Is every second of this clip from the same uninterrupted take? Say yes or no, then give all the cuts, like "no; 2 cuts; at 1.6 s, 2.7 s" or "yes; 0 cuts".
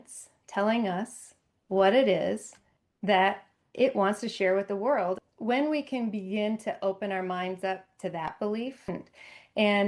no; 2 cuts; at 5.3 s, 8.9 s